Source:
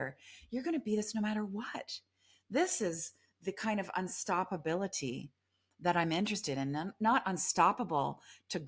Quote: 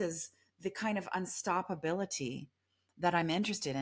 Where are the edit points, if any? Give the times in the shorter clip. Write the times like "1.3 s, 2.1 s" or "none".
none